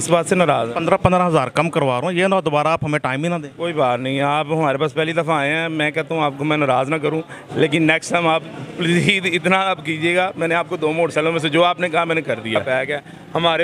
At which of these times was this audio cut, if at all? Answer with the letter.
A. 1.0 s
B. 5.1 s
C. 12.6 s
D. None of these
C